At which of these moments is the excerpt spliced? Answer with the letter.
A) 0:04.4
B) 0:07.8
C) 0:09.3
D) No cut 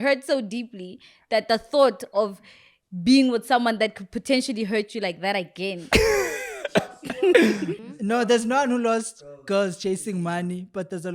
B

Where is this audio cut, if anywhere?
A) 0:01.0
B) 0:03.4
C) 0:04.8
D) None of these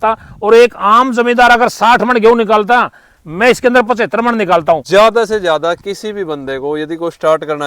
C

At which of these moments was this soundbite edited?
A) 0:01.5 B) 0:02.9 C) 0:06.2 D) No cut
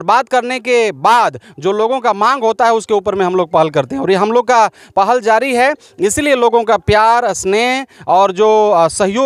D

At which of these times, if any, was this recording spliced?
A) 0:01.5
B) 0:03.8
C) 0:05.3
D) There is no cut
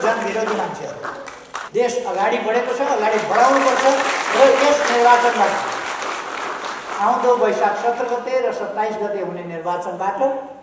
A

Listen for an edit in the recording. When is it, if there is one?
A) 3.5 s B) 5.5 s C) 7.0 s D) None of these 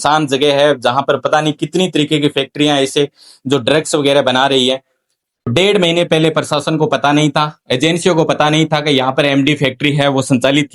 B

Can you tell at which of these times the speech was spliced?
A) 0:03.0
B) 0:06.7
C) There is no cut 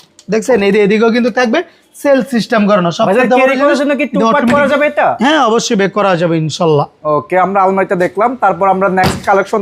C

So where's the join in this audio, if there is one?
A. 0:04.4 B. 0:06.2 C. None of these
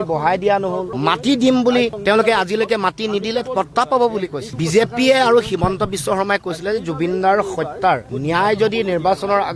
A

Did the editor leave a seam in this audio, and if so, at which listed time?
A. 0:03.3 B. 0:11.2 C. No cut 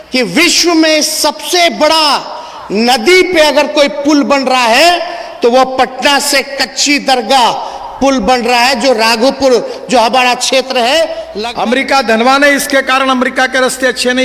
B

